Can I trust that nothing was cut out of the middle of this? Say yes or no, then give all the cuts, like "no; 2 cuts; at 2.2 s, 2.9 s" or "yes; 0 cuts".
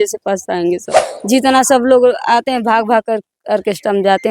no; 1 cut; at 1.1 s